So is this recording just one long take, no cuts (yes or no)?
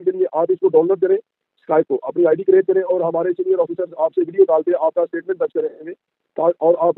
yes